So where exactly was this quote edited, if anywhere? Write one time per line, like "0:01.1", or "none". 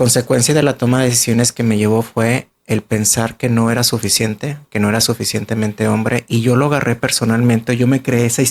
none

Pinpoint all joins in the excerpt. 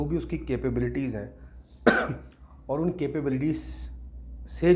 none

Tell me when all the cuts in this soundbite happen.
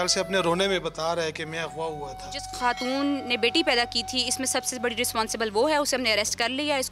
0:02.5

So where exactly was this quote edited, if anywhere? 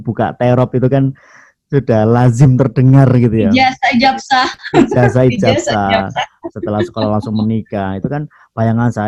none

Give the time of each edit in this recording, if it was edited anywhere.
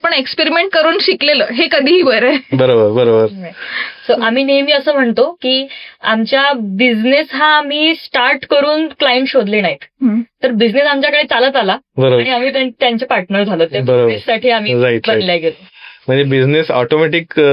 none

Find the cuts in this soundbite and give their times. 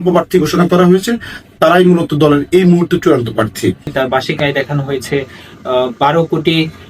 0:03.9

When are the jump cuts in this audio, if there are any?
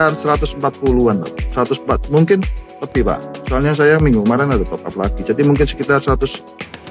none

